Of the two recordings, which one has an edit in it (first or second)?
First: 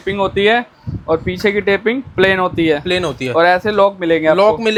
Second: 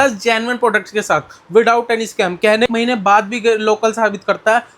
second